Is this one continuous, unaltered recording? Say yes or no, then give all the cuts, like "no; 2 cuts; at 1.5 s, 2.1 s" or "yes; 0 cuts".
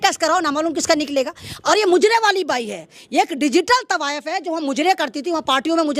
no; 1 cut; at 1.6 s